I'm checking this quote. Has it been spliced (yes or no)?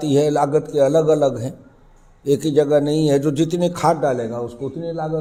no